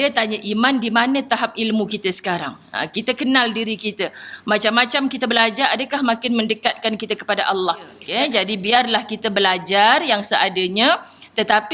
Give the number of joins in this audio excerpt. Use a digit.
1